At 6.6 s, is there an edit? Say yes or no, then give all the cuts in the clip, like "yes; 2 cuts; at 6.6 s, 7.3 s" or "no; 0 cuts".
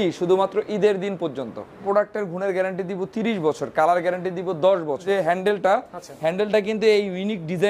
no; 2 cuts; at 1.8 s, 5.0 s